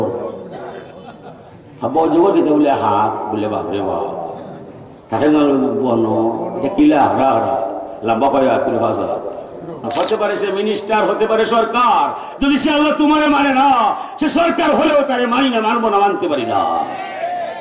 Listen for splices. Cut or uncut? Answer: cut